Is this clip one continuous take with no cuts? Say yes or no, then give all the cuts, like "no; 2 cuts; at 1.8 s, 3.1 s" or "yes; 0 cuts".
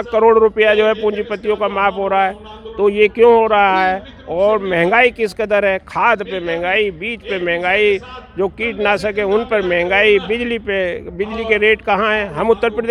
yes; 0 cuts